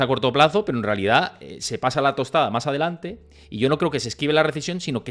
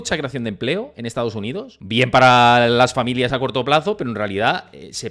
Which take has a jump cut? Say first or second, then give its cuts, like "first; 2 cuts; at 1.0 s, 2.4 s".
second; 1 cut; at 1.8 s